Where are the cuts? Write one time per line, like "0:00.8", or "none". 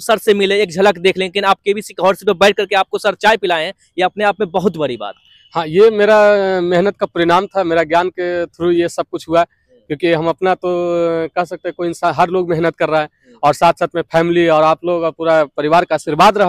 none